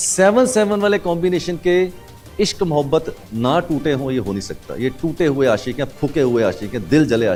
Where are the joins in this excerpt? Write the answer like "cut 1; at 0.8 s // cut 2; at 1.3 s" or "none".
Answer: none